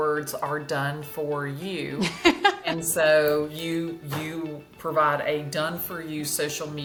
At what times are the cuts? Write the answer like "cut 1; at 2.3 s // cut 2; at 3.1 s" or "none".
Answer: none